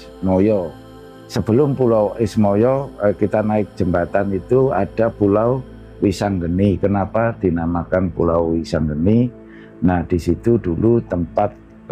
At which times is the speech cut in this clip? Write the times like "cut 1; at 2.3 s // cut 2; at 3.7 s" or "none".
cut 1; at 1.0 s